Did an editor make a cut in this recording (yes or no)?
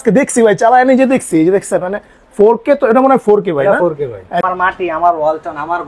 yes